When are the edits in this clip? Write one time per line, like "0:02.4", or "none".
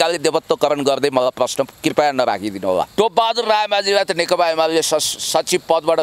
0:02.9

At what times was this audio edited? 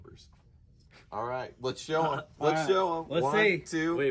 none

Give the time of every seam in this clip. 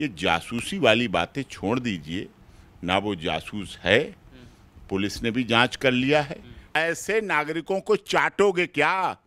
0:06.6

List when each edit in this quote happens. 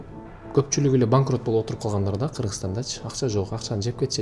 none

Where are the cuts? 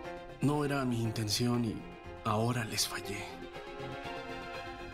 none

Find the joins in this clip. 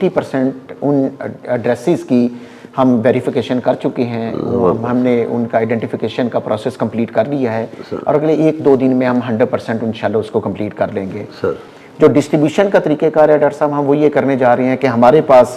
none

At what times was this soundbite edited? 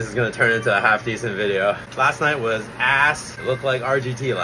0:01.9
0:03.3

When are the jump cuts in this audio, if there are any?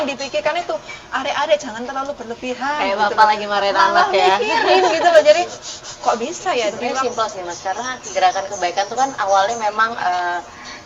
0:06.8

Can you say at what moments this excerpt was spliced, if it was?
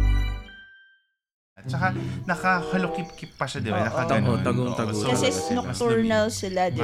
0:01.7

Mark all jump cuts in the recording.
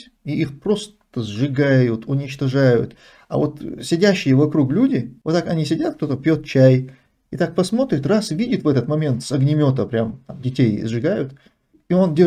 0:05.1

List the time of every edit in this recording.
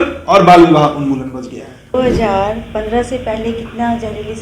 0:01.9

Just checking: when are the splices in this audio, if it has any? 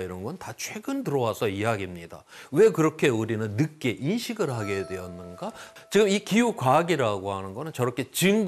0:05.7

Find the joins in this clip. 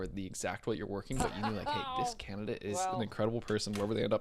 0:02.8

